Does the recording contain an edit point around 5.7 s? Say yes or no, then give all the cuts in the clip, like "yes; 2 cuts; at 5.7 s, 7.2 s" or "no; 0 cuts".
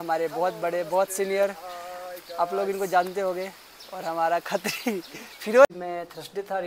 yes; 1 cut; at 5.7 s